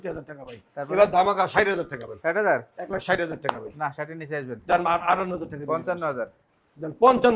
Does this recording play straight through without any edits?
yes; 0 cuts

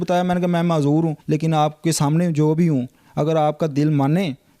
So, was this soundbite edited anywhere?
yes; 1 cut; at 1.2 s

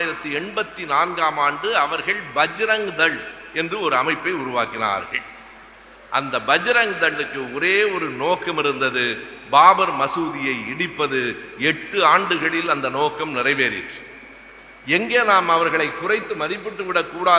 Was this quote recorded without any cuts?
yes; 0 cuts

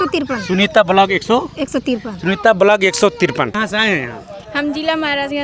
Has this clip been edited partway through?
yes; 1 cut; at 3.5 s

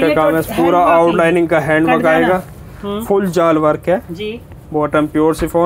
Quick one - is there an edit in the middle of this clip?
no; 0 cuts

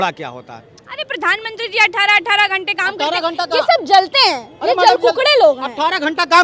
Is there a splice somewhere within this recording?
no; 0 cuts

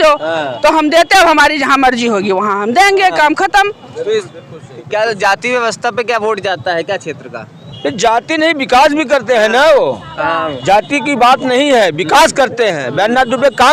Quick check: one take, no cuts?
yes; 0 cuts

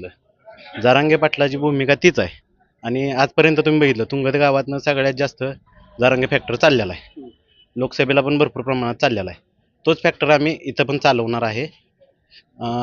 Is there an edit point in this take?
no; 0 cuts

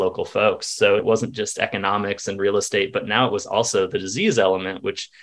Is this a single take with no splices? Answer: no; 1 cut; at 1.0 s

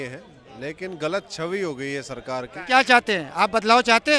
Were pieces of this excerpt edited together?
yes; 1 cut; at 2.6 s

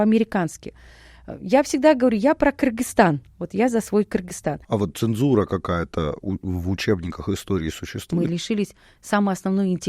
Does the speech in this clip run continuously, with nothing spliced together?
no; 2 cuts; at 4.5 s, 8.1 s

